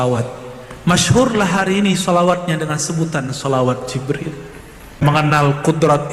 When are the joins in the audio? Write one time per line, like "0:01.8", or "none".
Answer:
0:05.0